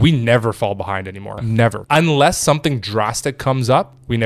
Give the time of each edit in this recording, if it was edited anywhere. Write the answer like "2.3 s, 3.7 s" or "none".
1.7 s